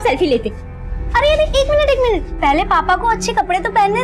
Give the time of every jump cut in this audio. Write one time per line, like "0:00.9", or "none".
0:02.3